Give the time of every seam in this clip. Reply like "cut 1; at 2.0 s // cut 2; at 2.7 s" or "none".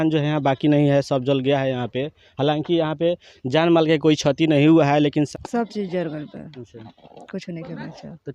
cut 1; at 5.3 s